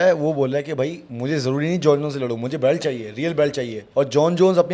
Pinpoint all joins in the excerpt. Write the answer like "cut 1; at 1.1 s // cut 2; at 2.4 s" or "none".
cut 1; at 1.1 s // cut 2; at 3.8 s